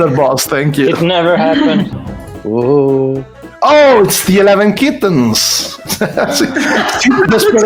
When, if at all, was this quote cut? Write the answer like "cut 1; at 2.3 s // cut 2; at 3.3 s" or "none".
none